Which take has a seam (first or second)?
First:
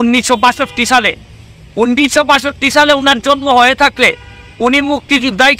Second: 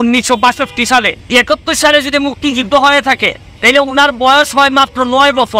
second